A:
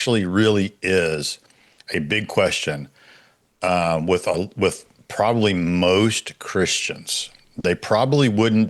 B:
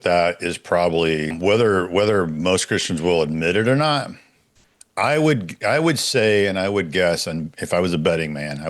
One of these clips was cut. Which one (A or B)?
B